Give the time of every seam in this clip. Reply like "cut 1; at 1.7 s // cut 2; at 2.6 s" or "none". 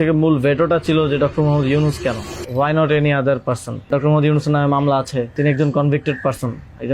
cut 1; at 2.3 s // cut 2; at 3.9 s // cut 3; at 5.3 s